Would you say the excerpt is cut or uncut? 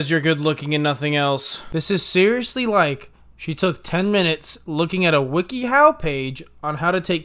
cut